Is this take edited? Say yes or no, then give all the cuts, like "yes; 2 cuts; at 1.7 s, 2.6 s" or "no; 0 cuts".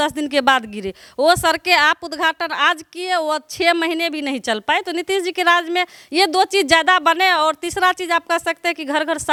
no; 0 cuts